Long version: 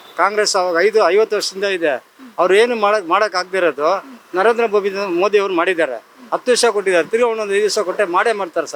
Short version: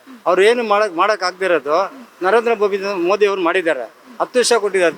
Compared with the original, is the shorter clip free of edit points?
yes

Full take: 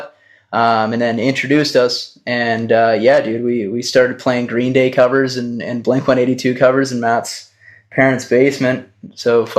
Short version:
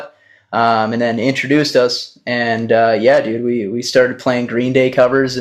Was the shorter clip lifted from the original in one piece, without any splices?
yes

